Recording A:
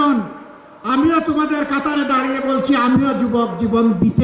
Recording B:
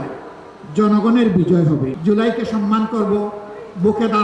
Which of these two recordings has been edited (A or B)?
B